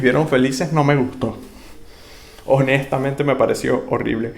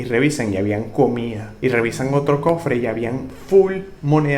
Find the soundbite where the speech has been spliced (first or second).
second